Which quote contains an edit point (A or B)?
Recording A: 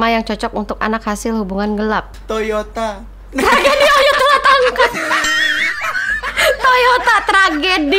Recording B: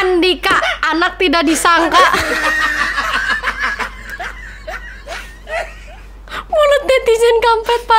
A